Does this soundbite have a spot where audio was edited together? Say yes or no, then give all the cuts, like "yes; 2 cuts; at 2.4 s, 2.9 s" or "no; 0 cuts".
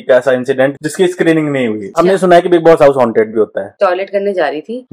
yes; 3 cuts; at 0.7 s, 1.9 s, 3.8 s